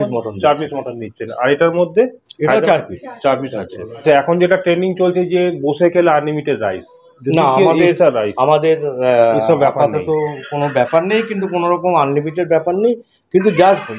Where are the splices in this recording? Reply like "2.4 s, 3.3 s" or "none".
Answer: 4.0 s